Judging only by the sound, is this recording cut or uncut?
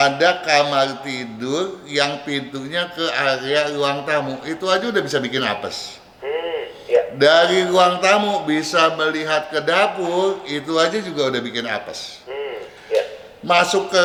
uncut